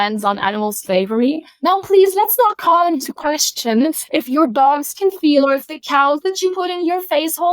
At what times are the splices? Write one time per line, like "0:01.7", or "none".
0:01.5